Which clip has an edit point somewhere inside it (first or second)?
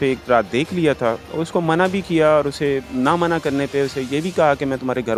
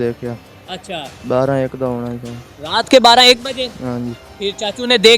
second